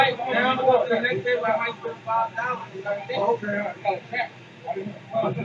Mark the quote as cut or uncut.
uncut